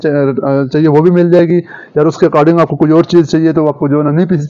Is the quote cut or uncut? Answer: uncut